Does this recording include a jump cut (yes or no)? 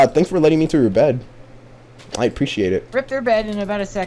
yes